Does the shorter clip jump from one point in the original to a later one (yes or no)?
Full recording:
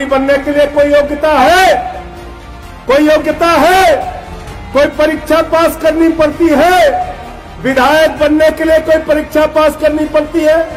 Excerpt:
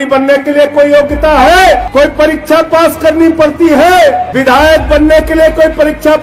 yes